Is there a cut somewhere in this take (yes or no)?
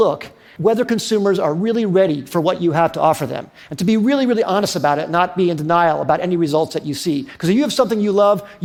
no